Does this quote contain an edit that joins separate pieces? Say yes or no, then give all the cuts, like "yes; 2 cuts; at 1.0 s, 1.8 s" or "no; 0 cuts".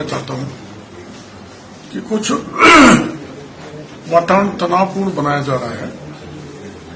no; 0 cuts